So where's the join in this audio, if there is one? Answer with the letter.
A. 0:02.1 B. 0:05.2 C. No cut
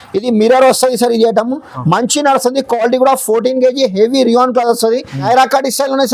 B